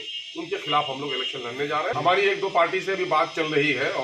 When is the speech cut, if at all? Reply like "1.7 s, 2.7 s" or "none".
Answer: 1.9 s